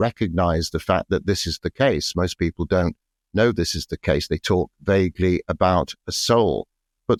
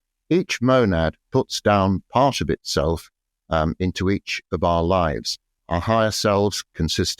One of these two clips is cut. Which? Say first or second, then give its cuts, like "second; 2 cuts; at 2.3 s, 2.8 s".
second; 1 cut; at 5.6 s